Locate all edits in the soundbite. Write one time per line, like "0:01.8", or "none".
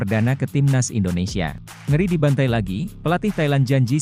0:01.7